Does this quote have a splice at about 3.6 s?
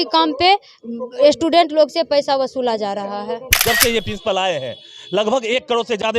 yes; 1 cut; at 3.6 s

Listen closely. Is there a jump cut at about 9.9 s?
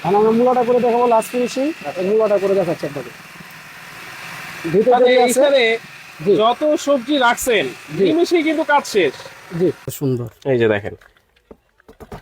yes; 1 cut; at 9.9 s

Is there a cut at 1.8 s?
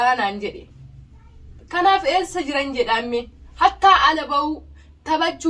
no; 1 cut; at 3.4 s

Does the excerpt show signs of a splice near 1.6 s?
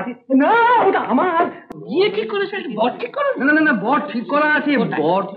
yes; 1 cut; at 1.6 s

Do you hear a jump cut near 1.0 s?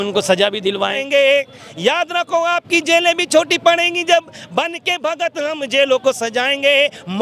yes; 1 cut; at 1.0 s

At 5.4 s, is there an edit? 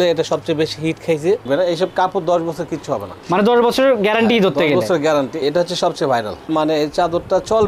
yes; 2 cuts; at 1.4 s, 5.4 s

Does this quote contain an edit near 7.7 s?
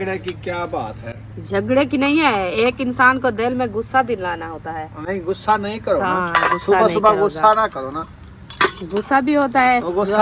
no; 0 cuts

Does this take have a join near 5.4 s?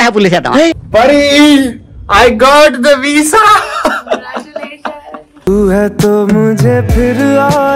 yes; 2 cuts; at 0.8 s, 5.4 s

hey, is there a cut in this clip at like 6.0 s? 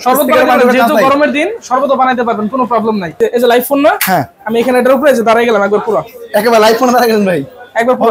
no; 1 cut; at 3.2 s

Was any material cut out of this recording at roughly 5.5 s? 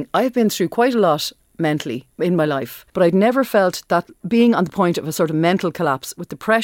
no; 3 cuts; at 2.0 s, 2.8 s, 4.2 s

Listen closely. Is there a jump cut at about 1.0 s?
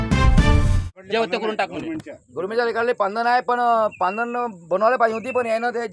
yes; 1 cut; at 1.0 s

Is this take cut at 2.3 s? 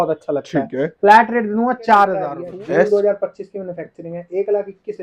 yes; 1 cut; at 2.3 s

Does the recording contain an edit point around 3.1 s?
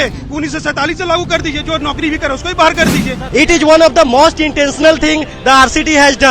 yes; 1 cut; at 3.1 s

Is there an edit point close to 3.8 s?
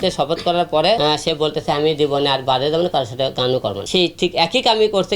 yes; 2 cuts; at 1.0 s, 3.8 s

